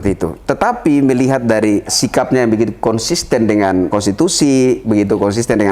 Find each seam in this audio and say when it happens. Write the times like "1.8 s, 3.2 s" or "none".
2.0 s, 3.9 s, 4.8 s